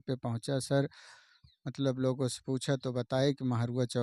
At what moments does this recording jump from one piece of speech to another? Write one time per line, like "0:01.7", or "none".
none